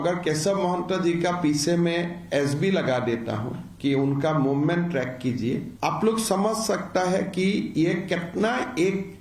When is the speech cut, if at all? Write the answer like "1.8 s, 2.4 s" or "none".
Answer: 5.7 s

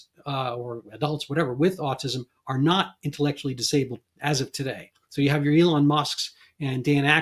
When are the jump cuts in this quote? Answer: none

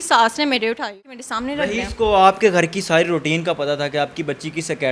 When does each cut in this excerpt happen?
1.1 s

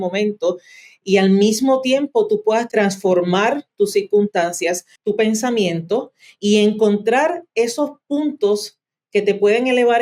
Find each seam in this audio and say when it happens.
2.7 s, 4.9 s

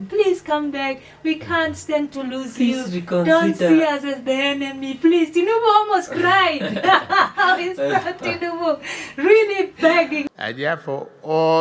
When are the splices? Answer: 10.2 s

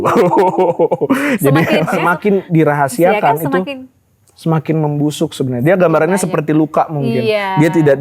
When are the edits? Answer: 2.0 s

